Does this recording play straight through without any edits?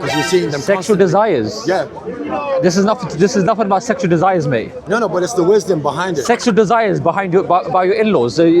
yes; 0 cuts

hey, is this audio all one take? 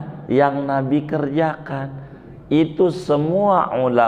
yes; 0 cuts

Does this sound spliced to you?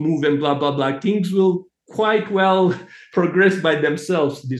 yes; 1 cut; at 3.0 s

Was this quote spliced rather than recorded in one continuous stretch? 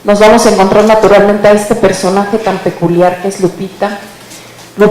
yes; 1 cut; at 2.5 s

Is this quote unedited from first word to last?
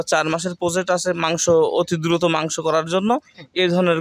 yes; 0 cuts

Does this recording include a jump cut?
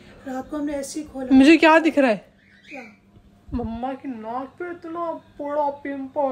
no; 0 cuts

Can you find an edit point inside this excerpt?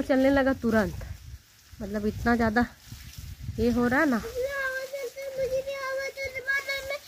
no; 0 cuts

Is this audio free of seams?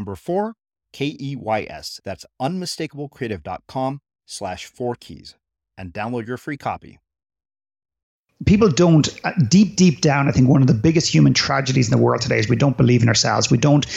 no; 1 cut; at 8.5 s

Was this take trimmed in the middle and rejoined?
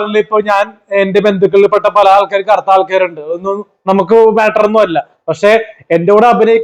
no; 0 cuts

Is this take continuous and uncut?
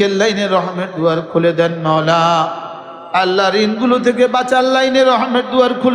yes; 0 cuts

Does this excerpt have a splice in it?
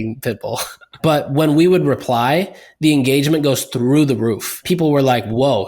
yes; 2 cuts; at 0.9 s, 4.6 s

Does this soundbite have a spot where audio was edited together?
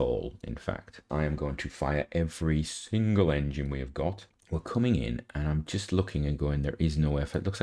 yes; 2 cuts; at 1.0 s, 4.3 s

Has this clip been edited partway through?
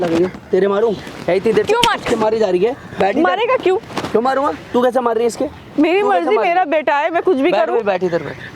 no; 0 cuts

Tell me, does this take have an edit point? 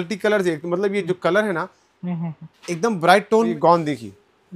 yes; 1 cut; at 3.5 s

